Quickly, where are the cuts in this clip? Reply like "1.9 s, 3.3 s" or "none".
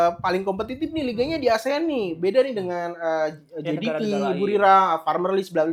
none

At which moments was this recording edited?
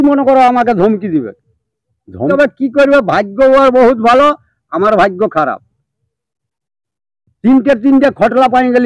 2.3 s

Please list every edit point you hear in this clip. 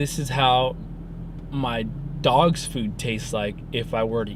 none

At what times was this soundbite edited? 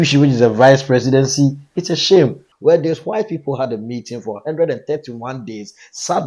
2.5 s

